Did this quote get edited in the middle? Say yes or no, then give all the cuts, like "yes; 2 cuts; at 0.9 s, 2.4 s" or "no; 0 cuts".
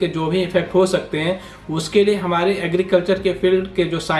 no; 0 cuts